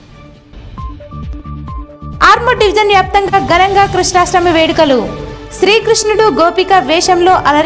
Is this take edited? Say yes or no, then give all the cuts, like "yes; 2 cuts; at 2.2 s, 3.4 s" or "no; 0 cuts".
no; 0 cuts